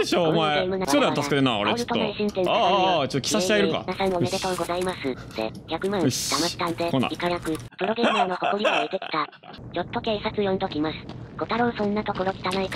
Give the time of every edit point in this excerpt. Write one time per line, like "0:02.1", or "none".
0:00.8
0:07.6
0:09.5